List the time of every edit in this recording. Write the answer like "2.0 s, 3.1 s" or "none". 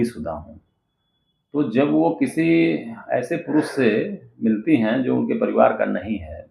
none